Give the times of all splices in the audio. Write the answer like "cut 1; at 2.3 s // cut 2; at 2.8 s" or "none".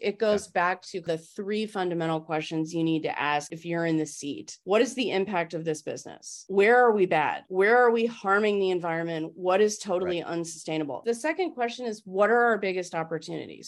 cut 1; at 1.0 s // cut 2; at 3.5 s // cut 3; at 4.5 s // cut 4; at 6.4 s // cut 5; at 7.4 s // cut 6; at 10.9 s